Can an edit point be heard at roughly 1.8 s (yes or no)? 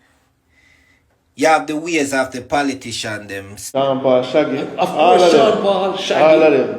no